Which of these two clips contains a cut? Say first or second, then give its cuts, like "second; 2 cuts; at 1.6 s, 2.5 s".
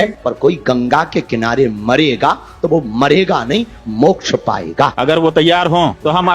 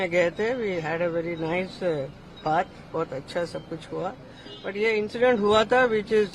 first; 1 cut; at 4.9 s